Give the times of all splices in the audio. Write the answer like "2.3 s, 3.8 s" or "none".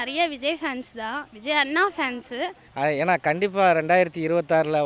2.6 s